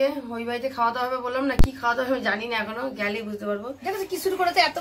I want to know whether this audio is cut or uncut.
cut